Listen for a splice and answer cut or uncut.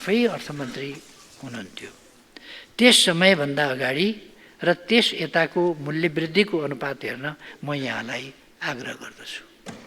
uncut